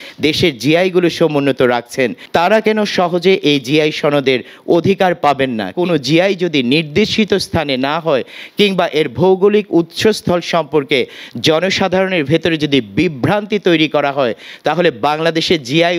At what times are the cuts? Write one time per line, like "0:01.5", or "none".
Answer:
0:02.2
0:05.7